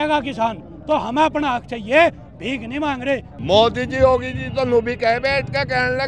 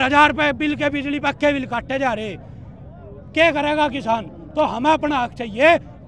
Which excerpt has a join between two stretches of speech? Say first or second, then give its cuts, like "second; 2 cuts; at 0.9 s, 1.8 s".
first; 1 cut; at 3.3 s